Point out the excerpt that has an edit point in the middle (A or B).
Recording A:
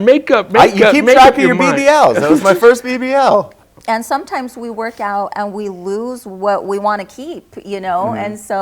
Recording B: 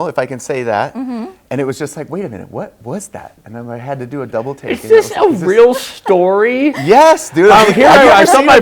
A